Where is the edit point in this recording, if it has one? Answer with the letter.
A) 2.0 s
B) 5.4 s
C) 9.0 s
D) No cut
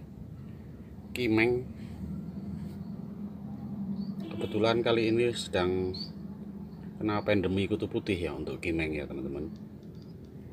D